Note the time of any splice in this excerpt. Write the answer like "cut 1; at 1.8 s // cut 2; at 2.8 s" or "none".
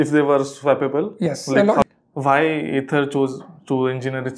cut 1; at 1.8 s